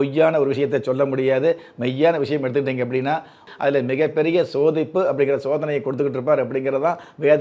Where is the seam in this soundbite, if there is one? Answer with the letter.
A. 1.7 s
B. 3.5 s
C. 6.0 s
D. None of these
B